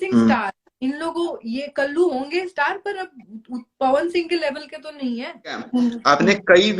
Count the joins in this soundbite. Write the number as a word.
one